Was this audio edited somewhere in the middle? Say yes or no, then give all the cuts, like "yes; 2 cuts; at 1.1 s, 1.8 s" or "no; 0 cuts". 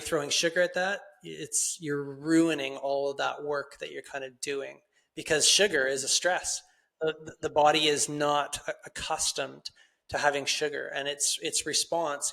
no; 0 cuts